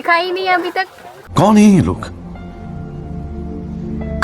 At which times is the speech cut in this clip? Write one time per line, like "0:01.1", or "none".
0:01.4